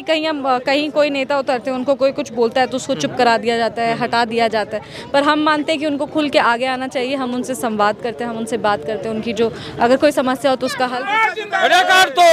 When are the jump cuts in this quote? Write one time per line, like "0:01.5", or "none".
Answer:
0:11.0